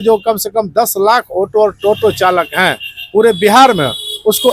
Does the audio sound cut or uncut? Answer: uncut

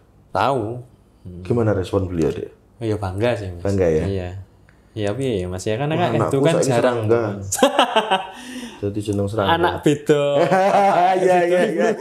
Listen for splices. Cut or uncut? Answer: uncut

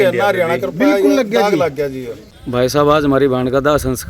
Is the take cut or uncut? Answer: cut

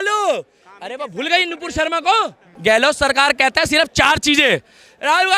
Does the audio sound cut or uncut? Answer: cut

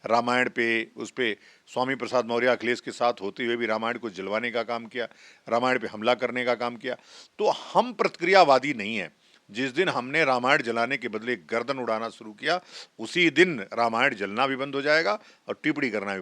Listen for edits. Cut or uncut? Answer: uncut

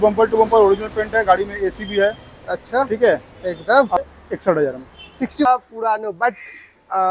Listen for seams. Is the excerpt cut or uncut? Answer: cut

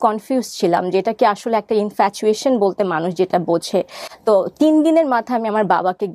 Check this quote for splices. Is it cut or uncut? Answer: cut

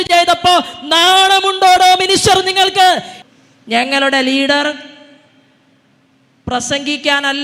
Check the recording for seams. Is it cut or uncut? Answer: cut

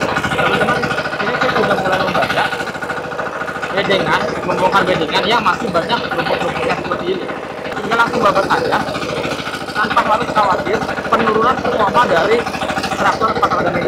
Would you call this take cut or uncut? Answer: cut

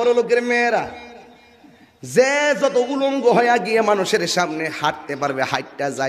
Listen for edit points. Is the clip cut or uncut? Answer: uncut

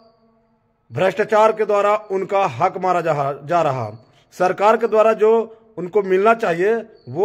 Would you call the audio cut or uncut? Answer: uncut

